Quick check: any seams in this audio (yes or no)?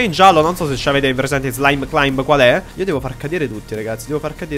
yes